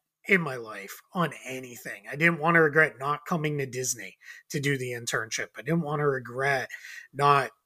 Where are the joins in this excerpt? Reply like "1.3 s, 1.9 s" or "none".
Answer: none